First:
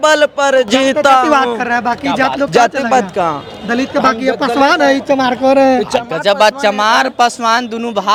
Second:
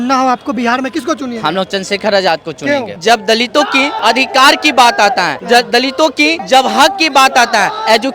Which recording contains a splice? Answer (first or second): second